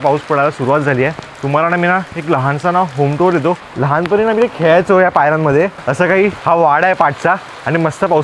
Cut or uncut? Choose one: cut